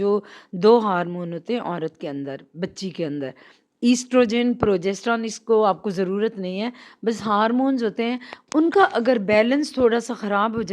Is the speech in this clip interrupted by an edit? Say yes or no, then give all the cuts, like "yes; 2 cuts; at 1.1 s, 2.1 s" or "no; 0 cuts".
no; 0 cuts